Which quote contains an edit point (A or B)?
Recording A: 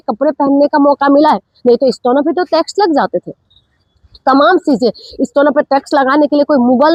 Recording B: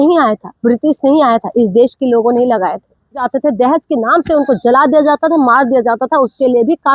B